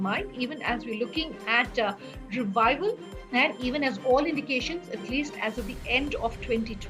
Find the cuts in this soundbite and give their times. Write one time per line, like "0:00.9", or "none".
0:03.1